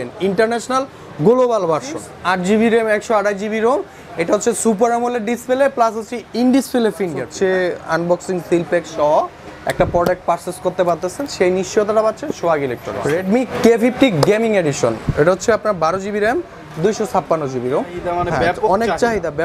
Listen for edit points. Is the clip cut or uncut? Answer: cut